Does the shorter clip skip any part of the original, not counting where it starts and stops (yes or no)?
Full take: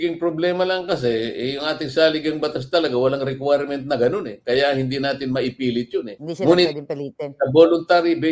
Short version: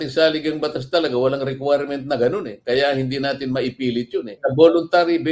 yes